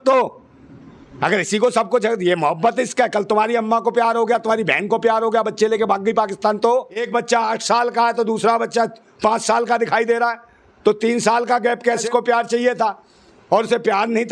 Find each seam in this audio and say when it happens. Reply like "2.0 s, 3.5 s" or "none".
7.1 s, 12.0 s